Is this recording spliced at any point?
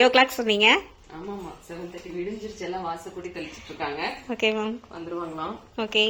no; 0 cuts

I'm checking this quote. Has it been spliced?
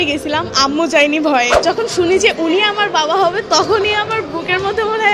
yes; 1 cut; at 1.6 s

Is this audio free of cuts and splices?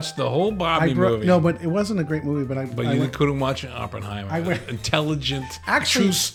yes; 0 cuts

